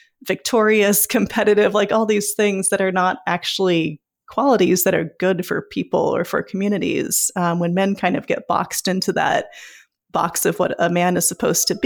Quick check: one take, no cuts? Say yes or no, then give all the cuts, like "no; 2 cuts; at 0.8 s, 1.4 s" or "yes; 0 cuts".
yes; 0 cuts